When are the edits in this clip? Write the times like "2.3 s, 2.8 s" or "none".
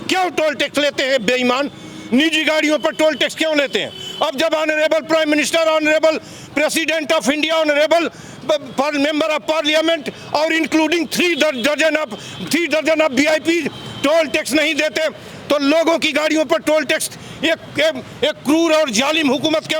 none